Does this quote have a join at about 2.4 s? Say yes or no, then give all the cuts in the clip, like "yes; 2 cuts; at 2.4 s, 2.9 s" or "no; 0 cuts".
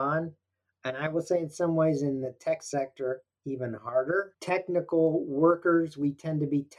no; 1 cut; at 4.4 s